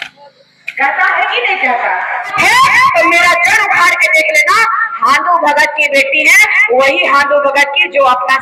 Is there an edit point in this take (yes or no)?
yes